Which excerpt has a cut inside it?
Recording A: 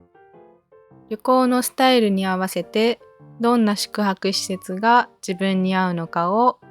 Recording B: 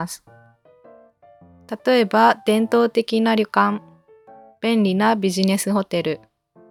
A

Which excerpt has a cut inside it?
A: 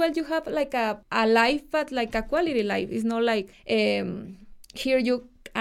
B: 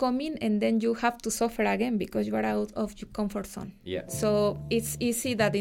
A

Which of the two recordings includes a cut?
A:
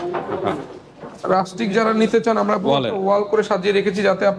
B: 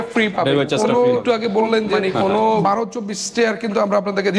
B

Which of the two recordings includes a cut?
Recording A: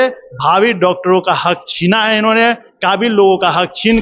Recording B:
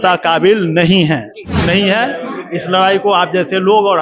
B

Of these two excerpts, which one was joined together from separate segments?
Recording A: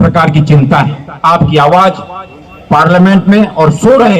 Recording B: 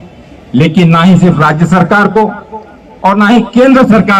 A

